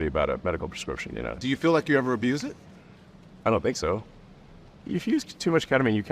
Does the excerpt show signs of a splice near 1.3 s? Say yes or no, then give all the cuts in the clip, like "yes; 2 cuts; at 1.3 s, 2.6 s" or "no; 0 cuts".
yes; 1 cut; at 1.3 s